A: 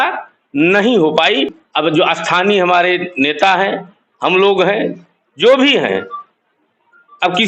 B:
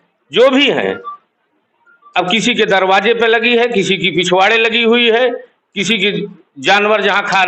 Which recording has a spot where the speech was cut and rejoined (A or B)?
A